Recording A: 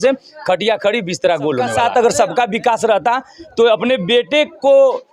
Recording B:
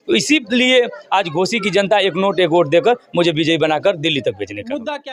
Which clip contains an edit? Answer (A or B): A